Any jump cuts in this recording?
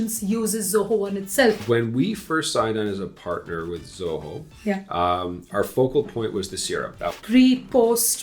yes; 2 cuts; at 1.6 s, 7.1 s

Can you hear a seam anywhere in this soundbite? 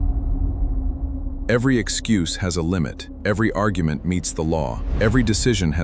no; 0 cuts

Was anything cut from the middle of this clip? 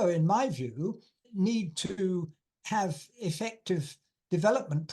yes; 1 cut; at 1.2 s

